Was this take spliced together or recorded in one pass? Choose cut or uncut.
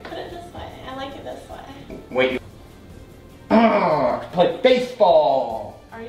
cut